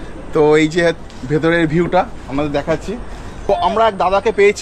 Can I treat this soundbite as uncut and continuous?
no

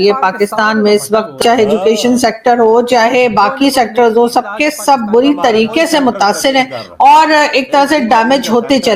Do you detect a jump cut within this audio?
yes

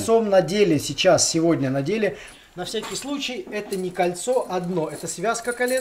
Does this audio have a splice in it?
yes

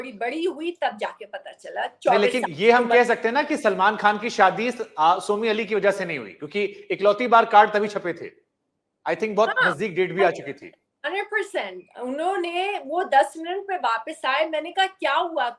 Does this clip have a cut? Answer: no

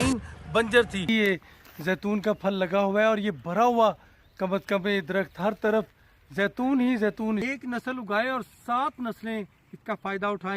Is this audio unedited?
no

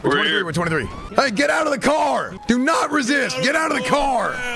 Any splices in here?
yes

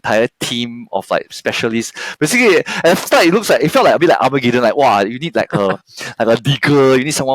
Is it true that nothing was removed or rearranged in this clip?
yes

